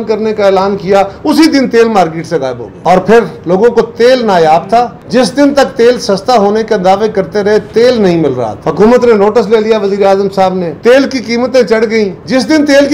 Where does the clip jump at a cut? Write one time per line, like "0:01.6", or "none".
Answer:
none